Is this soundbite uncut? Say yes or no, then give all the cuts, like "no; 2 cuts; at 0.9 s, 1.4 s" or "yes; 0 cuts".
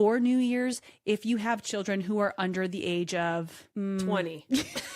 no; 1 cut; at 3.6 s